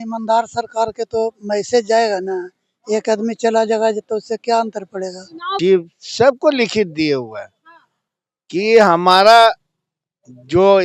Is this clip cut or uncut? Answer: cut